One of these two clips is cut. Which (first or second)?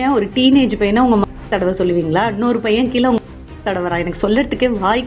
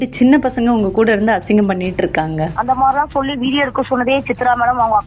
second